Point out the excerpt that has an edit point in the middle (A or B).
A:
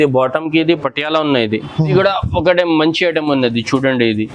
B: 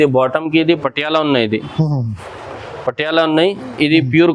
A